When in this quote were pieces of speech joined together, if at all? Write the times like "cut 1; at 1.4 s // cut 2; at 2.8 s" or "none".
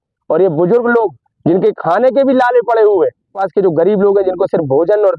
cut 1; at 3.4 s